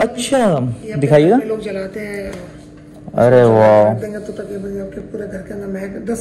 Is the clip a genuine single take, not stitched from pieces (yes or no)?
yes